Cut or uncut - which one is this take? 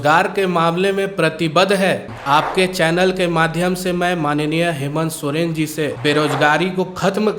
cut